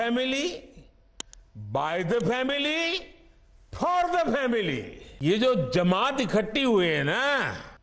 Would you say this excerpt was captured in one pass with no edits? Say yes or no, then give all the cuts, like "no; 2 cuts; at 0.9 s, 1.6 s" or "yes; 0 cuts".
yes; 0 cuts